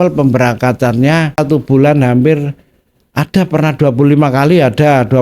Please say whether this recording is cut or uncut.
cut